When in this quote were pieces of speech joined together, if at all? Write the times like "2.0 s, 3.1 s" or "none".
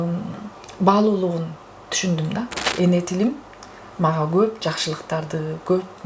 2.6 s